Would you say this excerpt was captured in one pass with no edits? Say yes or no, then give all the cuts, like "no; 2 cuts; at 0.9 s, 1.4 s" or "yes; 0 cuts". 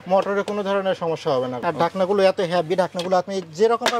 no; 1 cut; at 1.6 s